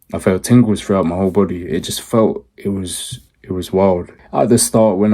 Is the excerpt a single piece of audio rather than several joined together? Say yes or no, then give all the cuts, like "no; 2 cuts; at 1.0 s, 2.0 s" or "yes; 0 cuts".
no; 1 cut; at 4.1 s